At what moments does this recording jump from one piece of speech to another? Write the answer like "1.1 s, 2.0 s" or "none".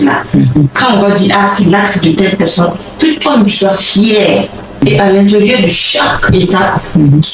4.8 s